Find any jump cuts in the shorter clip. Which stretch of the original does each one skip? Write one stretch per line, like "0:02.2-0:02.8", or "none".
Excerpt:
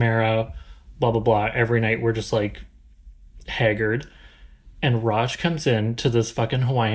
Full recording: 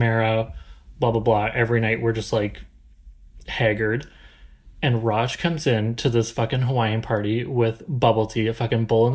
none